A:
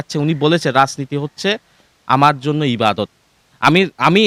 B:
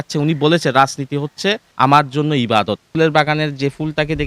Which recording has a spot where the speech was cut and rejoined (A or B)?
B